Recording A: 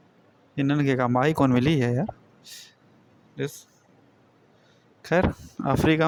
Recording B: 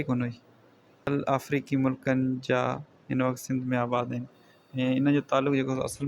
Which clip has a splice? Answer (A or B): B